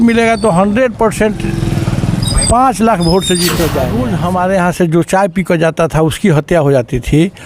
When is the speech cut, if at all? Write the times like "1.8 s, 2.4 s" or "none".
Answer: 4.0 s